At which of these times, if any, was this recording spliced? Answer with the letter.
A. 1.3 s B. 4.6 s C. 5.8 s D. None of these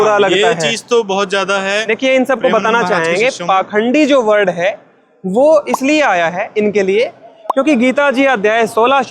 D